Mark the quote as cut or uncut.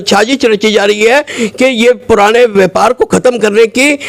uncut